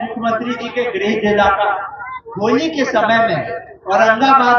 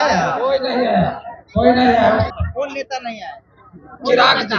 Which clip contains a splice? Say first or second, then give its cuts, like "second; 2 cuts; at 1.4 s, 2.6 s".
second; 1 cut; at 2.3 s